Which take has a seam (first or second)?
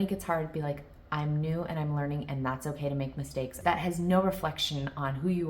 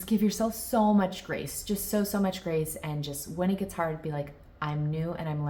first